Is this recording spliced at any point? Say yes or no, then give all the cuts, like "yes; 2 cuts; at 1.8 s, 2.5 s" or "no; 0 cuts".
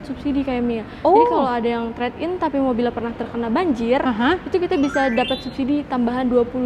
no; 0 cuts